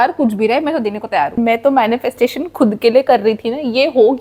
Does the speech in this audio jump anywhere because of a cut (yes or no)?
yes